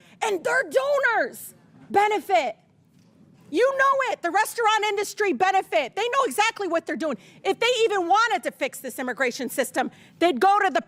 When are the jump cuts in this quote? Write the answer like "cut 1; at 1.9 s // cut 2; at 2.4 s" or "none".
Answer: none